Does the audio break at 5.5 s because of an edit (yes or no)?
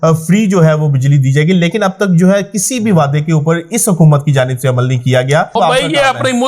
yes